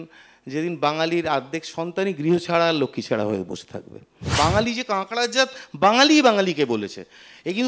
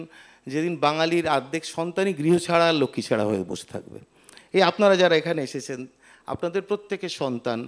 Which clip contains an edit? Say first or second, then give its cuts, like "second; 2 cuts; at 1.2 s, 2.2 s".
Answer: first; 1 cut; at 4.3 s